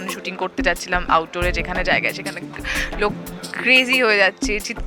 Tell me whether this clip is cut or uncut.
uncut